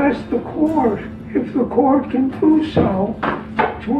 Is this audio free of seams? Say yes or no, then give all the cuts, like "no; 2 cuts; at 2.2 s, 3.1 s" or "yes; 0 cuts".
no; 1 cut; at 1.1 s